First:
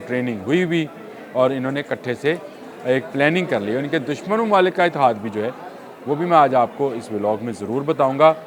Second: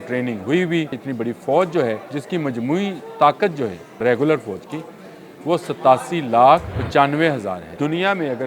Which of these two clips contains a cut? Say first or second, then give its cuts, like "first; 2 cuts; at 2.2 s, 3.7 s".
second; 5 cuts; at 1.0 s, 2.1 s, 4.0 s, 6.8 s, 7.7 s